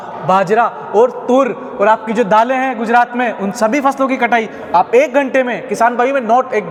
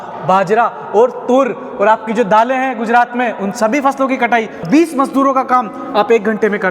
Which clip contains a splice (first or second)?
second